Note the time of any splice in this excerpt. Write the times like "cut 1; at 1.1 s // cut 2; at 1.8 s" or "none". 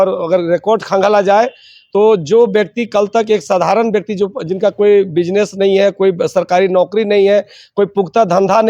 none

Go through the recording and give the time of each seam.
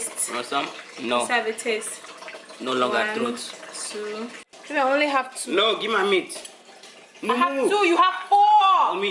cut 1; at 4.6 s

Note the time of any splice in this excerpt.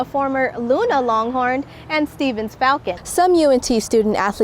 cut 1; at 3.0 s

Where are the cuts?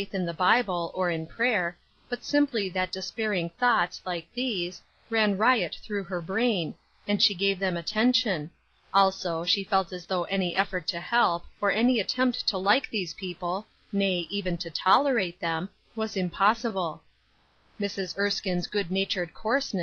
cut 1; at 2.5 s

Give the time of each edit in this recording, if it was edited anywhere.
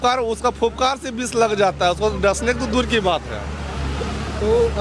none

